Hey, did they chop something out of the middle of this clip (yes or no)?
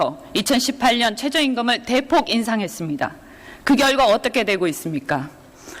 yes